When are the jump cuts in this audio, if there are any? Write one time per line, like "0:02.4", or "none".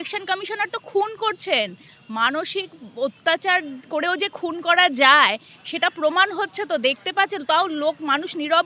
none